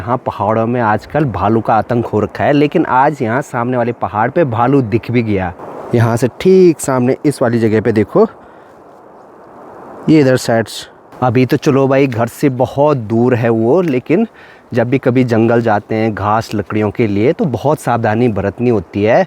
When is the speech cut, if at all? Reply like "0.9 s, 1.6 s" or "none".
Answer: none